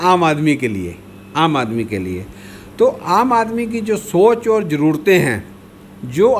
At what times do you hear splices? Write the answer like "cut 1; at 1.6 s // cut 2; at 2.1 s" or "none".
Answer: none